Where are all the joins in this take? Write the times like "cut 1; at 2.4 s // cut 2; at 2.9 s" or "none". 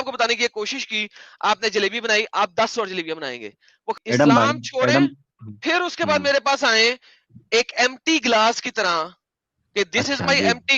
cut 1; at 4.0 s